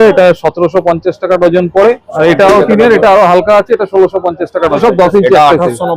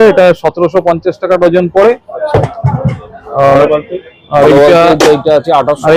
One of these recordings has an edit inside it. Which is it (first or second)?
first